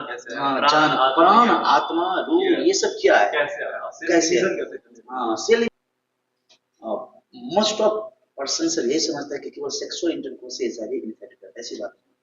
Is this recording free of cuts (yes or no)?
no